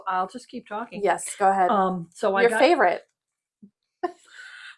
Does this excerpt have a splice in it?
no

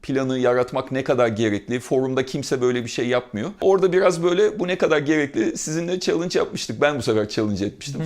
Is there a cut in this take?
yes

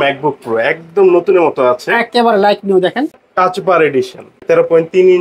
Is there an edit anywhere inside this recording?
yes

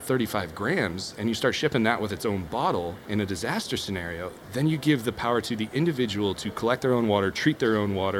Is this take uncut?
yes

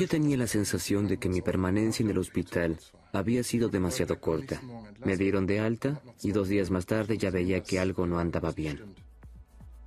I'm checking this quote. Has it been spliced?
no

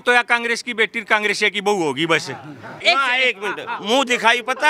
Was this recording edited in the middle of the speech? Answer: yes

